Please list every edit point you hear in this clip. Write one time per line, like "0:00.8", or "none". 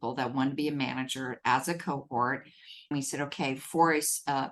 0:02.9

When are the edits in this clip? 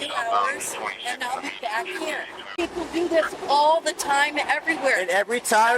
0:02.5

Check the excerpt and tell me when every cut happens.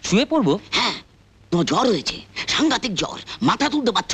none

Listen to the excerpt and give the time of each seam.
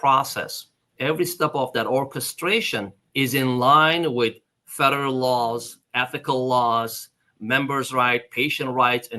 0:03.0

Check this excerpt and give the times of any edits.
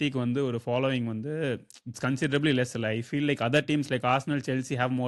none

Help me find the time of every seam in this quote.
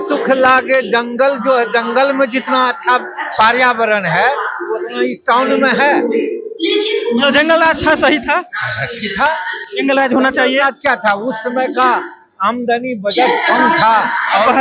none

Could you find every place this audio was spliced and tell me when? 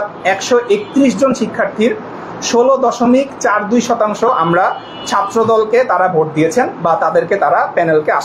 none

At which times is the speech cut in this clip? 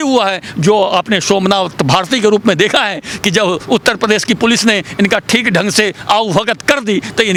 none

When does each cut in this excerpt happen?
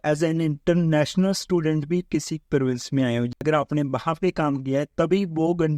0:03.4

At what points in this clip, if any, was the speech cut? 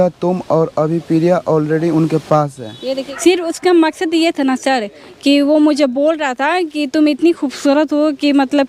0:03.1

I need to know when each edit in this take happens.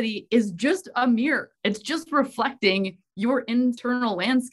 none

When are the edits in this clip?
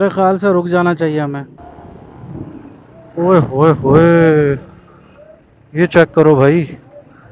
0:01.6

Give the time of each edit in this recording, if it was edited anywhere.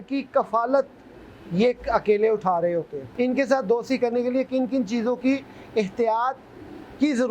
0:03.0

